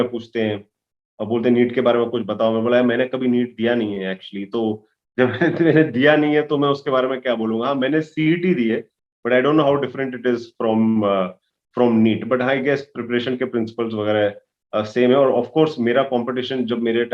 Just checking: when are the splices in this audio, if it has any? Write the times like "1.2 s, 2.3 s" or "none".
none